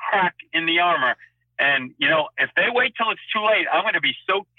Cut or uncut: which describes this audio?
uncut